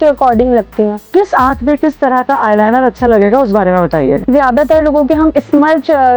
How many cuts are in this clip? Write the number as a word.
two